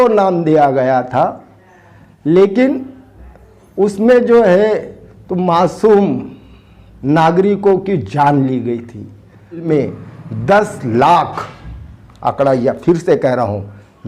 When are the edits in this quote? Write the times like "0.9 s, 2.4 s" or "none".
9.6 s